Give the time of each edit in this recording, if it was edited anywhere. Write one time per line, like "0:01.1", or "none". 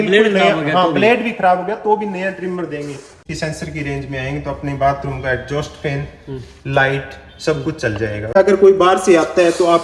0:03.2
0:08.3